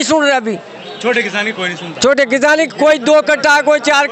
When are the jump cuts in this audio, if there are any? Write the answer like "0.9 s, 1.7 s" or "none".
none